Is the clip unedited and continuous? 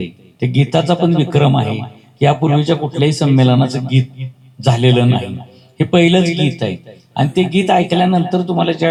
yes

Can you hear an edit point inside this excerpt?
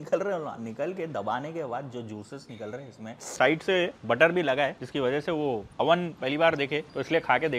yes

